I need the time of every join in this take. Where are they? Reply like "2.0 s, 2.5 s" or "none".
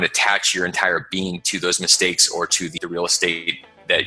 none